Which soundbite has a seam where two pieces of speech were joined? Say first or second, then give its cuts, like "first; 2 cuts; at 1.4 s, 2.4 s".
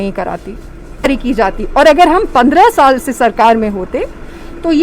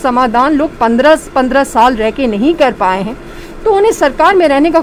first; 1 cut; at 1.0 s